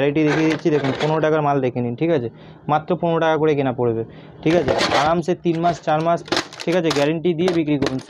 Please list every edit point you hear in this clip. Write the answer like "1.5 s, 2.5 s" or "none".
none